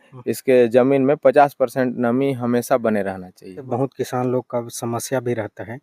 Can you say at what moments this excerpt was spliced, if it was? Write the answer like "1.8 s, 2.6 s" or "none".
3.7 s